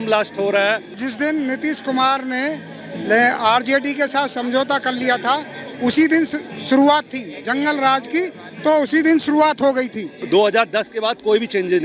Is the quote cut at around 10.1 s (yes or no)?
yes